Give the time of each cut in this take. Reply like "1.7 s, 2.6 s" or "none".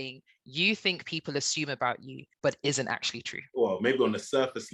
none